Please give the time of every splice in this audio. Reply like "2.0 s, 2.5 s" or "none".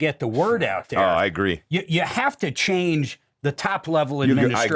none